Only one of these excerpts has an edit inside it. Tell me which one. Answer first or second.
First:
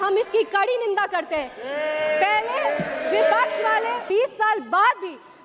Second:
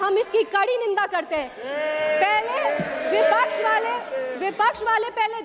first